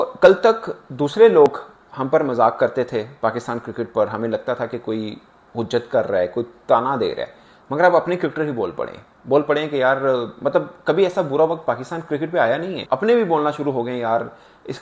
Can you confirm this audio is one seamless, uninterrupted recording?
yes; 0 cuts

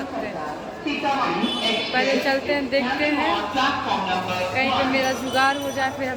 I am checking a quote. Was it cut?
no; 0 cuts

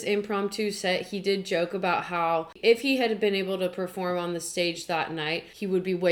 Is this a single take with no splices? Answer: yes; 0 cuts

